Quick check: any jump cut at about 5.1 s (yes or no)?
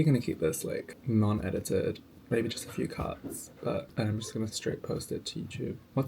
no